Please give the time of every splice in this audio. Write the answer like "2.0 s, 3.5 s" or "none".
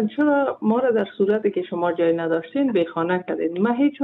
none